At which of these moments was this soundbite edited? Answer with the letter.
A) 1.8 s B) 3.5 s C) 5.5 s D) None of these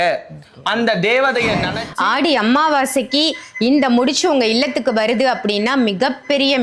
A